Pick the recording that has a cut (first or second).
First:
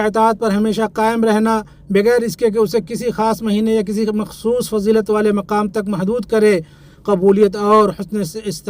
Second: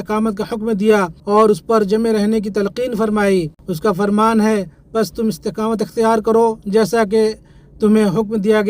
second